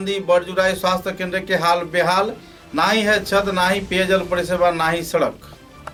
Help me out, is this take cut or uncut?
uncut